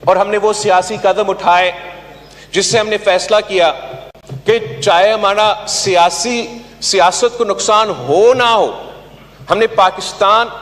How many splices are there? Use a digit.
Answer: 0